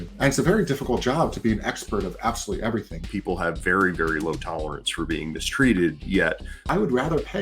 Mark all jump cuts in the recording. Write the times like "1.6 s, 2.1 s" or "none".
3.0 s, 6.6 s